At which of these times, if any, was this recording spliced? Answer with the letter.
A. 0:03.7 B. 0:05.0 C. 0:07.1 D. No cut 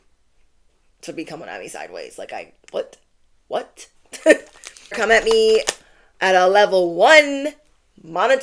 B